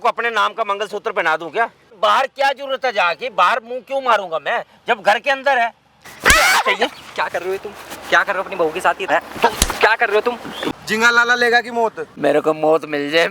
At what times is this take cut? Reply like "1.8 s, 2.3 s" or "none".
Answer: 2.0 s, 6.1 s, 9.1 s, 10.5 s, 12.0 s